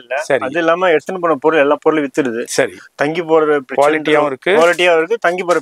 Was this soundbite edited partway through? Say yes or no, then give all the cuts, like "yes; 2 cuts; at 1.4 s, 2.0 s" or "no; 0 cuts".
no; 0 cuts